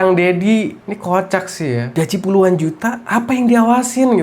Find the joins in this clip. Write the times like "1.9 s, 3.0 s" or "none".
3.0 s